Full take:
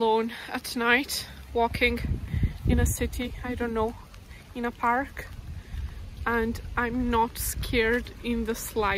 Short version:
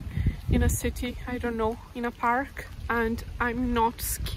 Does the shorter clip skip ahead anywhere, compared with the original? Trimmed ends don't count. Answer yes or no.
yes